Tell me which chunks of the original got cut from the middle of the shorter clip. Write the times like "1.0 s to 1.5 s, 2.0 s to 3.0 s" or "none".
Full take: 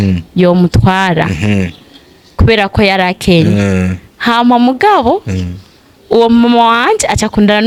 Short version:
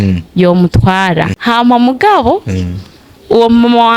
1.3 s to 4.1 s